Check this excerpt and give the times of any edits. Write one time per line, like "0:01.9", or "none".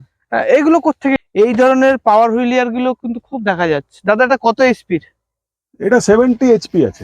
0:01.2